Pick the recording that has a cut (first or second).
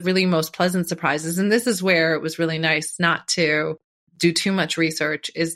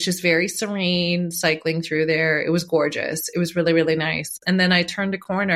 first